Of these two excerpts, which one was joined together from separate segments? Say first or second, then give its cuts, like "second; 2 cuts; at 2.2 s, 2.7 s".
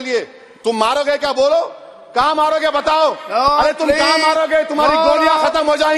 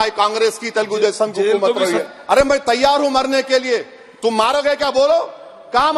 second; 1 cut; at 2.0 s